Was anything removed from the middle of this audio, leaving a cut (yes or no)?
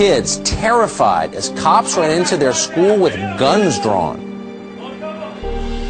yes